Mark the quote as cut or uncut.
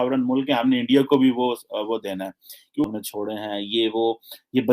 cut